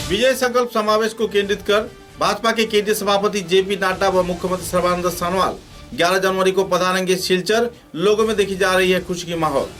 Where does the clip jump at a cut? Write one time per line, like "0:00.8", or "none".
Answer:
none

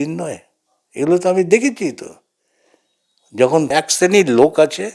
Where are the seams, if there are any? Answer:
0:03.7

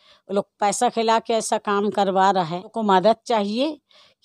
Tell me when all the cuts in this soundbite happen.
0:02.8

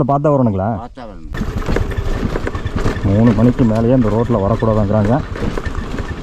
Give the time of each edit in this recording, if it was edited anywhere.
0:01.3

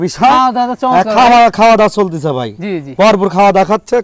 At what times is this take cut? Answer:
none

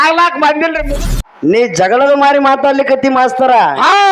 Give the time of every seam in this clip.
0:01.2

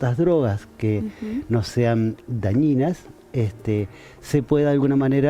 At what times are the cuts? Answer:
none

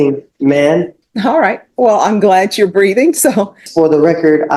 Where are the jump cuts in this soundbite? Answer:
0:01.0
0:03.6

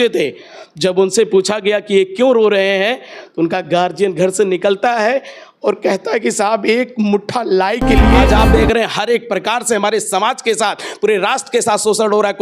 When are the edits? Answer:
0:08.2

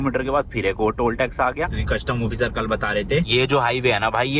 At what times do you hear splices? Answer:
0:01.8
0:03.3

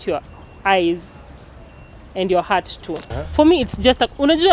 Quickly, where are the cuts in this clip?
0:03.2

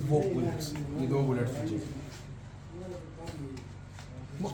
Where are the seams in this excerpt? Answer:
none

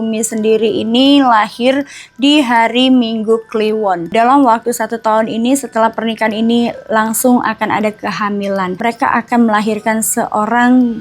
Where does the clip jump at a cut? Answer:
0:04.1
0:08.8

